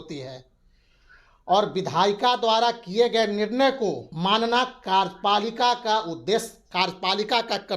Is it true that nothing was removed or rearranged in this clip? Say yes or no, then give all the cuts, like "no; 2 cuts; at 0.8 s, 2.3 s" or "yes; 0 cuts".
no; 1 cut; at 4.1 s